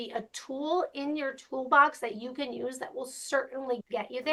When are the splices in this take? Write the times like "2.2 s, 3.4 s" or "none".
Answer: none